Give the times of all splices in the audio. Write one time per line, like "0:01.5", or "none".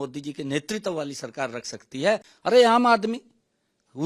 0:02.3

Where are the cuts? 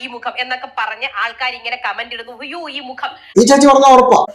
0:03.2

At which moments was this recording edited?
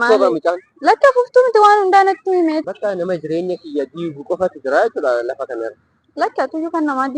0:02.6

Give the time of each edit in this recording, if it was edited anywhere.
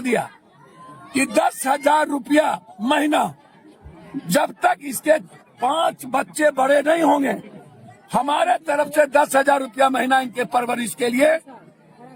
none

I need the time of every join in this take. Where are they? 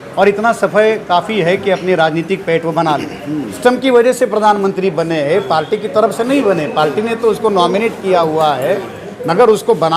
0:03.6

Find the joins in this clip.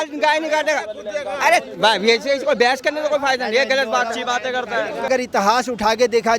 0:05.1

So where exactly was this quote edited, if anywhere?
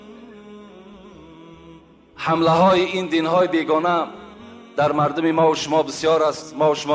0:01.9

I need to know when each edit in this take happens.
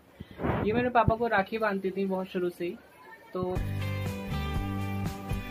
0:03.6

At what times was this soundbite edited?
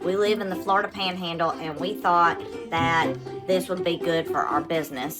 none

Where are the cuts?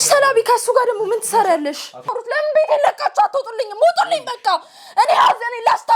0:02.2

